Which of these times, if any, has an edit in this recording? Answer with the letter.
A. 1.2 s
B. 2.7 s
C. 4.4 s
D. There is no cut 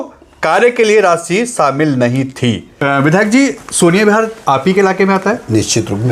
B